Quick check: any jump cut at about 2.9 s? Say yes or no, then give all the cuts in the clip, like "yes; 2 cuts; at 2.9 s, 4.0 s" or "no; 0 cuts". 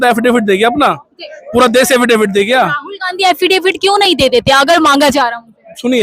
no; 0 cuts